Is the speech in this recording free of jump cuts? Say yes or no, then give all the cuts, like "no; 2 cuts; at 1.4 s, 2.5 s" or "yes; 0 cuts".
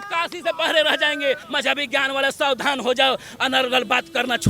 no; 1 cut; at 1.5 s